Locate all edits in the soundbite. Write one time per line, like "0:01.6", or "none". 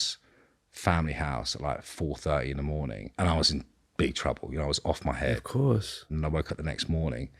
0:03.0
0:06.1